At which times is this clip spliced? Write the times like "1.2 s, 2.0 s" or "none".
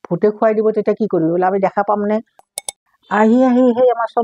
2.4 s